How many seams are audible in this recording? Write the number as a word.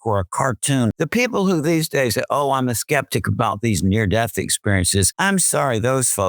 two